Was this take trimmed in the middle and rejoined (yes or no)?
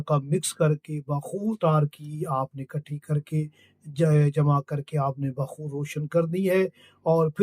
yes